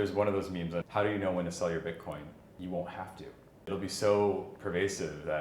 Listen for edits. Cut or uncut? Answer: cut